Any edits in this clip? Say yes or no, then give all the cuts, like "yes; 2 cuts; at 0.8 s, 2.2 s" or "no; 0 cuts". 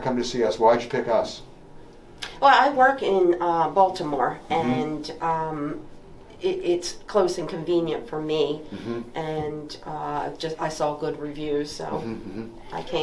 no; 0 cuts